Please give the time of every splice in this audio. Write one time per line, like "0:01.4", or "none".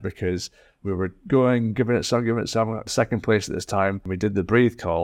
0:02.9
0:04.1